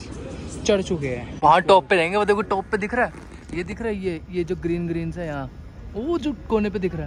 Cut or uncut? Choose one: cut